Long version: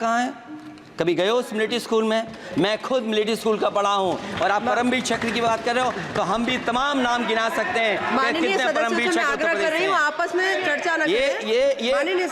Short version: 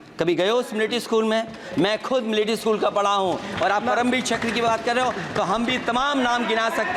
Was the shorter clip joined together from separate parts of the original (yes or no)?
no